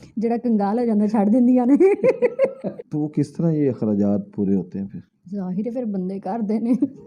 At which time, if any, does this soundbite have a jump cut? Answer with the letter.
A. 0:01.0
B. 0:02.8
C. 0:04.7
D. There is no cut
B